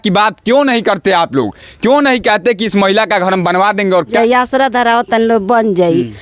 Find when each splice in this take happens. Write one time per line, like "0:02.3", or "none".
0:04.1